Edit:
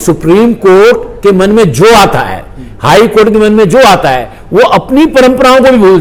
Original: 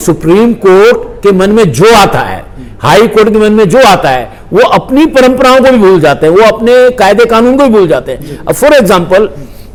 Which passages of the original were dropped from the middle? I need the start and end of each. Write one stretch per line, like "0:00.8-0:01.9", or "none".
none